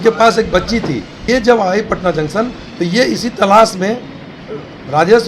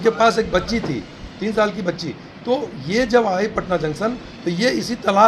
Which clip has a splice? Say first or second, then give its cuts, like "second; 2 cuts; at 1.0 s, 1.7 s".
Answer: first; 1 cut; at 1.1 s